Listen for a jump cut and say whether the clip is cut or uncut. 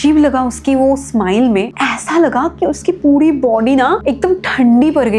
cut